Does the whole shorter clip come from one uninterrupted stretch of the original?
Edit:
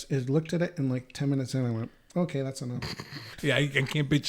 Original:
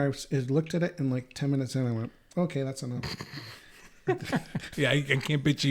no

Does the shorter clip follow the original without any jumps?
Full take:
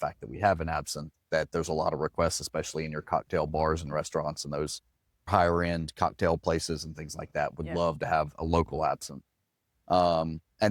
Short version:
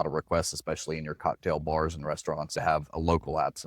no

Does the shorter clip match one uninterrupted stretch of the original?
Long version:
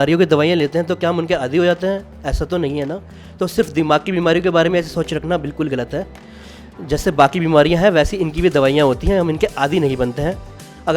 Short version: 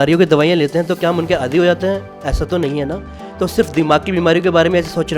yes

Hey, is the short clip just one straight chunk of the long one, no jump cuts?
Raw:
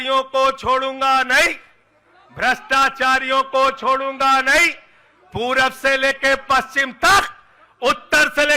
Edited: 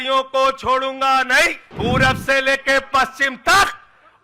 no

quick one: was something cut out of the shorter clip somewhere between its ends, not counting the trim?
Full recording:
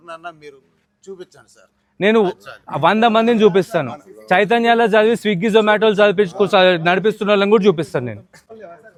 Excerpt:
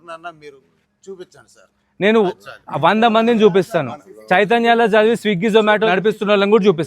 yes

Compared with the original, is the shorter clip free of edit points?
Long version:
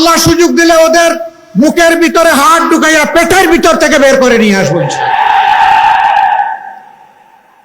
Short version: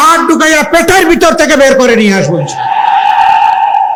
yes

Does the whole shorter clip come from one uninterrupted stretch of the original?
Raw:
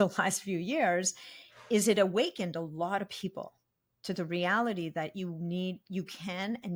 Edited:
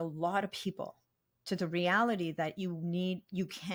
yes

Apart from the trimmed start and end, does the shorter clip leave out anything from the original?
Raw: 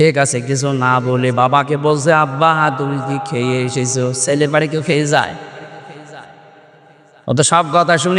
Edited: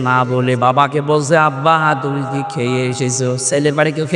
no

